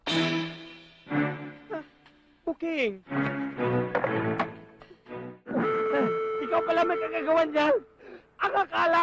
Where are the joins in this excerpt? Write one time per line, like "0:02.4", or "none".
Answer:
0:05.4